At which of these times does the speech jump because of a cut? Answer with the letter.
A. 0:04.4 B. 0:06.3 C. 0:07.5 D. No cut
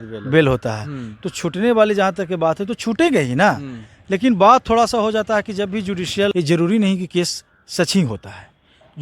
B